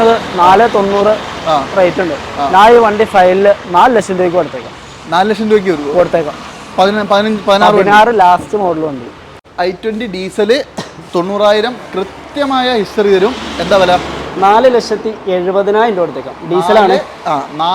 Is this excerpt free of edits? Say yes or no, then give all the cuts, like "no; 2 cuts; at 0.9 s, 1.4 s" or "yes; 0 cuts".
no; 1 cut; at 9.4 s